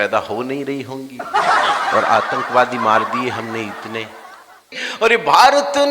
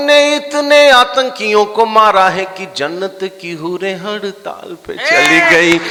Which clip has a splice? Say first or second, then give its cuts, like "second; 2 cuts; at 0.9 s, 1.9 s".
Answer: first; 1 cut; at 4.8 s